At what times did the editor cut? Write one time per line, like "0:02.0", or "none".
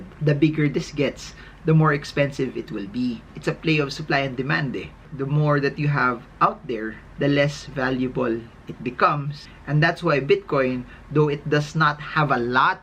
0:03.3